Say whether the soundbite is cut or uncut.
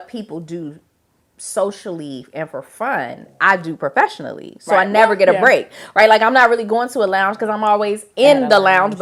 uncut